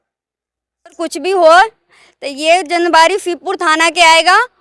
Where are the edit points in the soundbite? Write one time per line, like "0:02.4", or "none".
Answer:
0:01.0